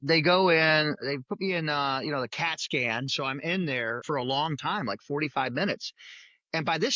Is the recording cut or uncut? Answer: cut